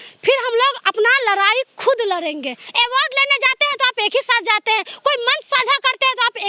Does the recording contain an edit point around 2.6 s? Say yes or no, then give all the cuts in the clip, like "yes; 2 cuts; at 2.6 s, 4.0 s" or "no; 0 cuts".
yes; 1 cut; at 2.6 s